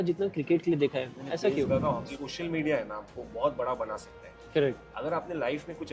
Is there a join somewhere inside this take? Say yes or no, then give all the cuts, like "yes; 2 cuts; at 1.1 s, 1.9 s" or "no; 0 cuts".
yes; 1 cut; at 2.1 s